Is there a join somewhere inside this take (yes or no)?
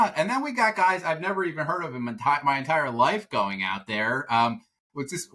no